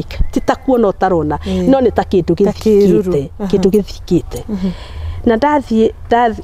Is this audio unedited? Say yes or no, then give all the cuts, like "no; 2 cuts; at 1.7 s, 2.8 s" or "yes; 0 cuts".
yes; 0 cuts